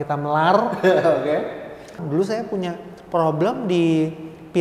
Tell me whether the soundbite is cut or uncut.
cut